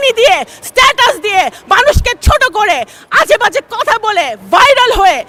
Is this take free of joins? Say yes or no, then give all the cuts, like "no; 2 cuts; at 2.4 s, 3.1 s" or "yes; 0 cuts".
yes; 0 cuts